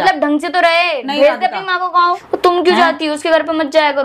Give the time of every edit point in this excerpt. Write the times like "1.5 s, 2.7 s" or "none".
2.3 s